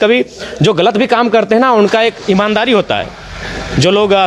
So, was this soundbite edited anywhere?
no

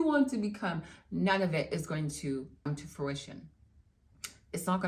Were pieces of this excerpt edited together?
yes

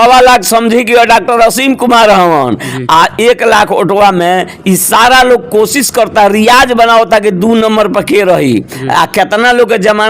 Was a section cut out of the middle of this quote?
no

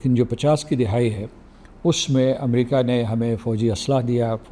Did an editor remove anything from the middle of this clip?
no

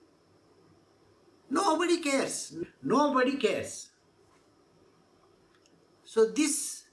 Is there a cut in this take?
yes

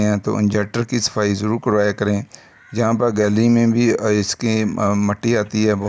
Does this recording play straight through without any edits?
yes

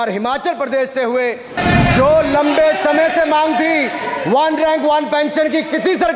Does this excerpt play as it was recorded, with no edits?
no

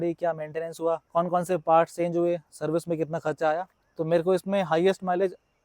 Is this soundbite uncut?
no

